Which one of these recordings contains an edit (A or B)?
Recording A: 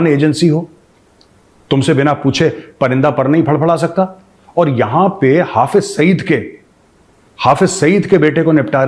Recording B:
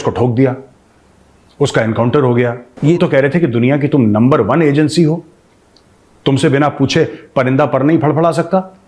B